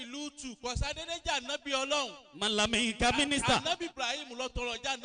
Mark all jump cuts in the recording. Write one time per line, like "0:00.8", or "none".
none